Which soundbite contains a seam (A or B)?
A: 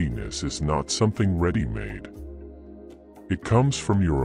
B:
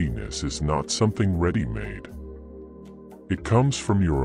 A